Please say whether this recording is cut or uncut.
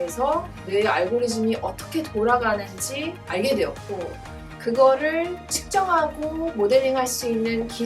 uncut